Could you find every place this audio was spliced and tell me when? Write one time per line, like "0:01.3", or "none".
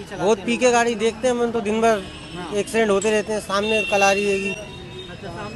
none